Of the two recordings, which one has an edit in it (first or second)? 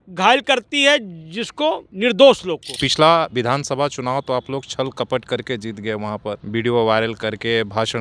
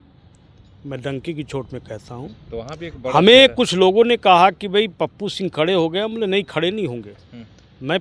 first